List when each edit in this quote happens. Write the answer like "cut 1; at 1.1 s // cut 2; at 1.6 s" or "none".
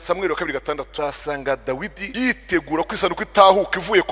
cut 1; at 0.9 s // cut 2; at 2.0 s